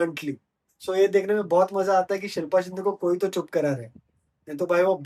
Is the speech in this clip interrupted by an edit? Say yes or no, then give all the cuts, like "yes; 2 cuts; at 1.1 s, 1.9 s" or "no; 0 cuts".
no; 0 cuts